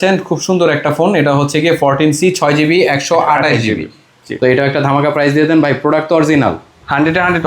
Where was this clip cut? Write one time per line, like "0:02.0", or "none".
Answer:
0:04.2